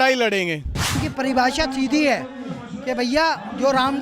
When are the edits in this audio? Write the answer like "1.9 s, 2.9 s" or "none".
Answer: 1.0 s